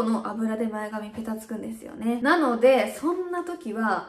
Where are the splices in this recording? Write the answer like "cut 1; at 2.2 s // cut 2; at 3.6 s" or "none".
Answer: none